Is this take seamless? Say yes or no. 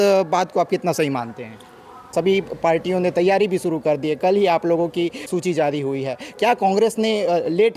no